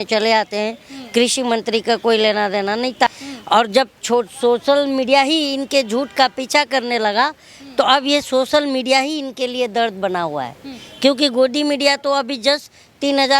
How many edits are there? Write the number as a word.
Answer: one